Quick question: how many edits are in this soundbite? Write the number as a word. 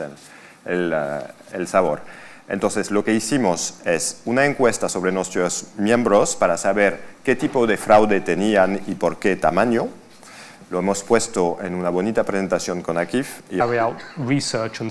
zero